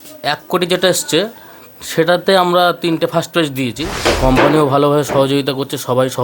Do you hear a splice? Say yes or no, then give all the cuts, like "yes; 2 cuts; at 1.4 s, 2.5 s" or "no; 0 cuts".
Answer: yes; 1 cut; at 3.9 s